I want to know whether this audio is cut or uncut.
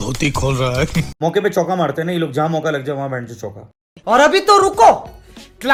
uncut